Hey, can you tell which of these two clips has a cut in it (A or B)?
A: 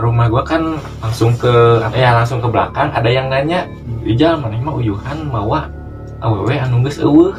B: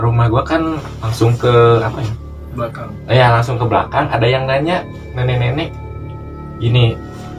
A